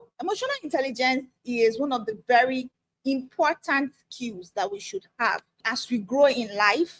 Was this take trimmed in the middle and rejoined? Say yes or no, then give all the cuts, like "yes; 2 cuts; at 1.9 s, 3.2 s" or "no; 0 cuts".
no; 0 cuts